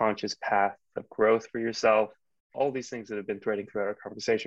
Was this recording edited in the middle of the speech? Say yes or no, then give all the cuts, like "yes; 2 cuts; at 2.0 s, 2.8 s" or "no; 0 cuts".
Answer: no; 0 cuts